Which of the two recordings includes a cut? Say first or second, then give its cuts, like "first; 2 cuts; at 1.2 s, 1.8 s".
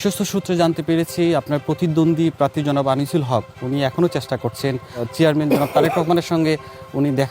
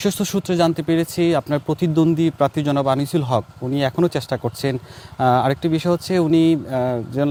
first; 1 cut; at 5.0 s